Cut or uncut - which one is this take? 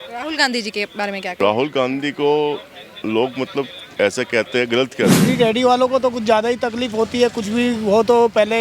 cut